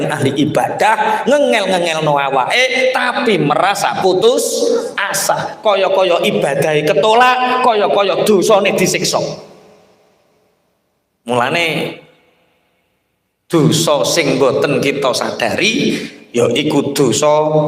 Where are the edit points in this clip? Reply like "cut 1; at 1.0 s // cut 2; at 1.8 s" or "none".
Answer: none

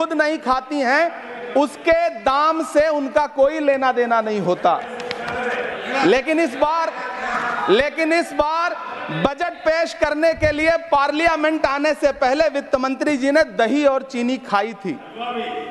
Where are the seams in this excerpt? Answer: none

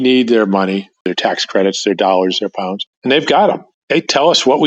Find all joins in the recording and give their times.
cut 1; at 1.0 s // cut 2; at 2.8 s // cut 3; at 3.7 s

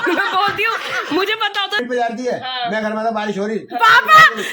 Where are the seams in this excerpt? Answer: cut 1; at 1.8 s

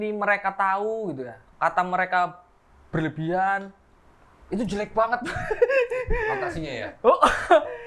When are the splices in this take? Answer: none

